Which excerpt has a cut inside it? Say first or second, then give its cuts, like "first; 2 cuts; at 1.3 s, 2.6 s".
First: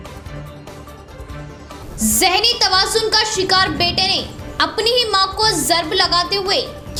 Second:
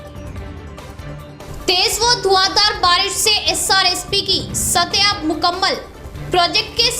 second; 1 cut; at 1.4 s